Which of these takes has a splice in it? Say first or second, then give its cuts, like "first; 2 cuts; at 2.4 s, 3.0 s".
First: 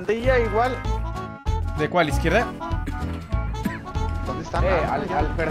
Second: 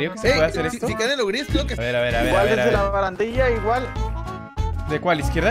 second; 1 cut; at 1.8 s